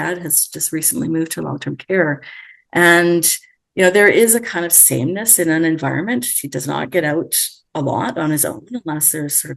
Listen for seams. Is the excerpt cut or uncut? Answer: uncut